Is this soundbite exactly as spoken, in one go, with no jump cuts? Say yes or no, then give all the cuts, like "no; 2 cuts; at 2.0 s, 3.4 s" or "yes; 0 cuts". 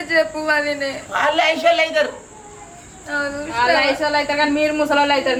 yes; 0 cuts